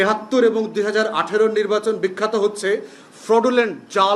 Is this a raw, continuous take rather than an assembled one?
yes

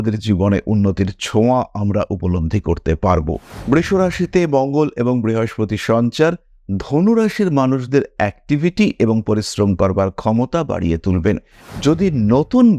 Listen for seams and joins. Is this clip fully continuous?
no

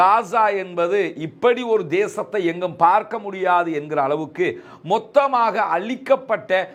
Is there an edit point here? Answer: no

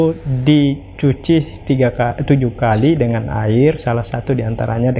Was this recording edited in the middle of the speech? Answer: no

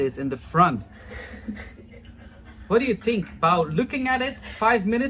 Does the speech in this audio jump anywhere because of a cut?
no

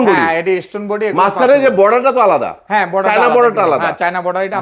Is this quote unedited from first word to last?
yes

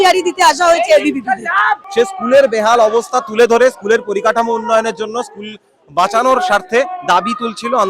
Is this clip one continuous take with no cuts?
no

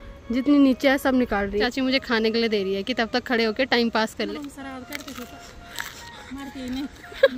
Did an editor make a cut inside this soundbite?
yes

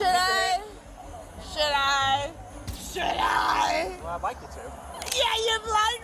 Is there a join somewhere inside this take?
no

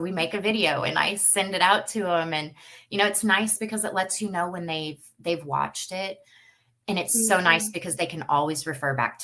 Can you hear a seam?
no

